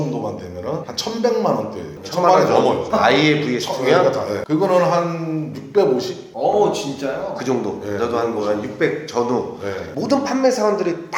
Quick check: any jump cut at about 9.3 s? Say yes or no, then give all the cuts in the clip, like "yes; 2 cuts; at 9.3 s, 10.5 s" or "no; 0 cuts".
no; 3 cuts; at 0.9 s, 2.9 s, 4.4 s